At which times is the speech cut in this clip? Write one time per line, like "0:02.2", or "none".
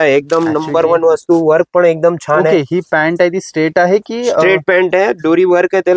none